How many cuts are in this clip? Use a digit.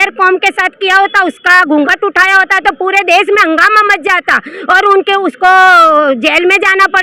0